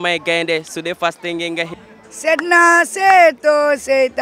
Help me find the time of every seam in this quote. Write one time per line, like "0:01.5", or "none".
0:02.0